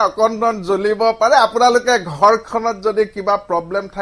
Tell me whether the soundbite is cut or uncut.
uncut